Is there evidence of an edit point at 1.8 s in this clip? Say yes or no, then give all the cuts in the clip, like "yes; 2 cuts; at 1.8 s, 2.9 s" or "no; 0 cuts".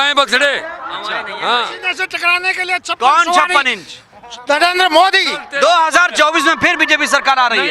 yes; 2 cuts; at 1.8 s, 5.4 s